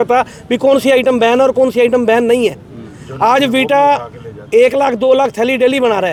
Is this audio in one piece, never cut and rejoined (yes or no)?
yes